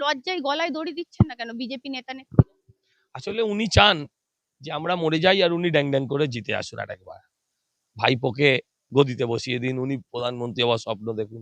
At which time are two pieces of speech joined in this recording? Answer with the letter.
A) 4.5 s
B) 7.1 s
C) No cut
C